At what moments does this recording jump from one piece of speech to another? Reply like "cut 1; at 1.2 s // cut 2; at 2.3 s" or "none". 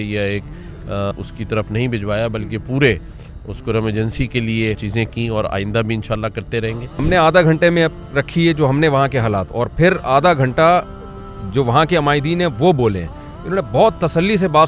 cut 1; at 1.1 s // cut 2; at 4.8 s // cut 3; at 7.0 s